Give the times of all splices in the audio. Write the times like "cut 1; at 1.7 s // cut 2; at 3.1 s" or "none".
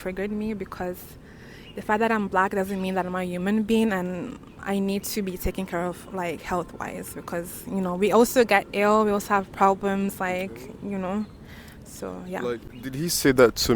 none